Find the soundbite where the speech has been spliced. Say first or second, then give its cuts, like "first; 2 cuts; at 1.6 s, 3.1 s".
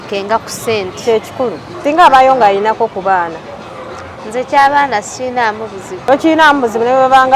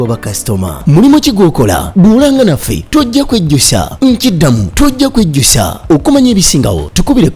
first; 2 cuts; at 1.7 s, 5.9 s